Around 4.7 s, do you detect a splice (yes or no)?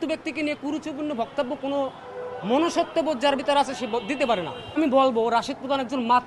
yes